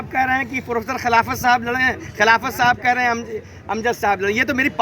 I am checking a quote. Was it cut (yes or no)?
no